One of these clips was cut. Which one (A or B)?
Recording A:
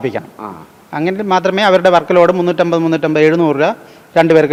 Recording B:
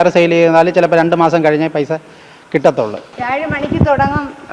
B